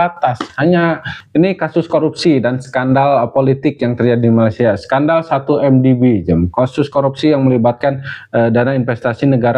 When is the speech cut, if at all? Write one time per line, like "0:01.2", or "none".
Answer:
0:01.2